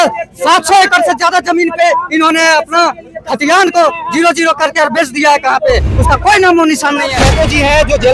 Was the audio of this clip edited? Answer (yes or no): yes